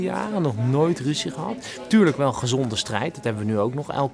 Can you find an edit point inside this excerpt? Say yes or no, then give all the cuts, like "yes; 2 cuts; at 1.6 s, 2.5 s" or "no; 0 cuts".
no; 0 cuts